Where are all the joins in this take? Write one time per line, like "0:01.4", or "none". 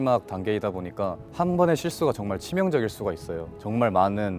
0:01.2
0:03.5